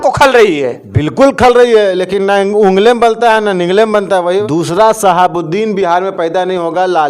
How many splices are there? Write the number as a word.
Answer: one